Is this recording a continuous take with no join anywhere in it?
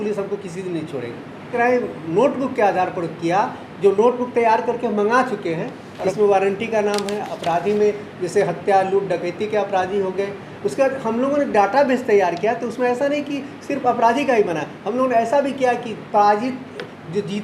no; 2 cuts; at 1.5 s, 6.0 s

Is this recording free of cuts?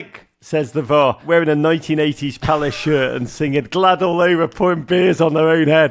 no; 1 cut; at 1.2 s

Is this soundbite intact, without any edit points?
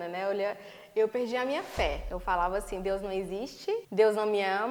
no; 2 cuts; at 2.1 s, 3.9 s

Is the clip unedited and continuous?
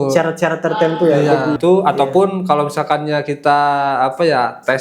no; 1 cut; at 1.6 s

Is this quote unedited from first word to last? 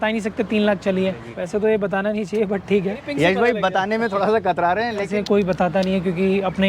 no; 3 cuts; at 1.3 s, 3.0 s, 5.1 s

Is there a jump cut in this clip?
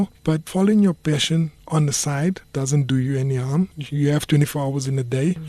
yes; 2 cuts; at 2.4 s, 3.8 s

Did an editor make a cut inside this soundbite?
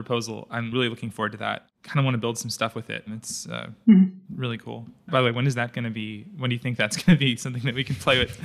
yes; 1 cut; at 1.0 s

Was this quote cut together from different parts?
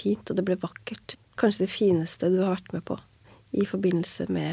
yes; 1 cut; at 1.1 s

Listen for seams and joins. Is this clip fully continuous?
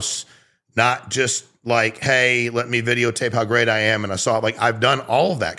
yes; 0 cuts

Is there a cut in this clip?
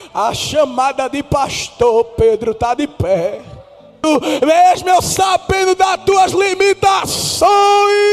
yes; 1 cut; at 4.0 s

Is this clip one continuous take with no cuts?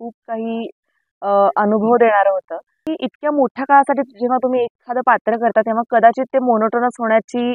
no; 1 cut; at 2.8 s

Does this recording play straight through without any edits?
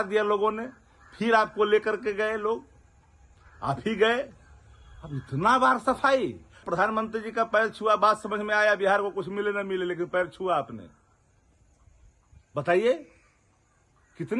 no; 1 cut; at 6.6 s

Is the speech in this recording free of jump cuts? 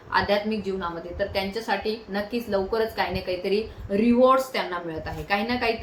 yes; 0 cuts

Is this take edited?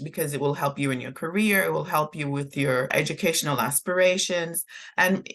yes; 1 cut; at 2.9 s

